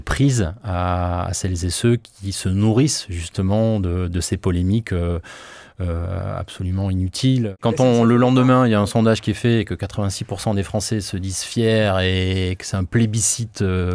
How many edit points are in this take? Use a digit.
1